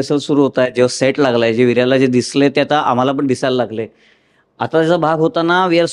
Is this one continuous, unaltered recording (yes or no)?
yes